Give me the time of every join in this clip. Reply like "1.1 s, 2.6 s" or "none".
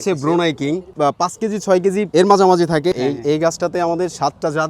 0.9 s, 2.1 s, 2.9 s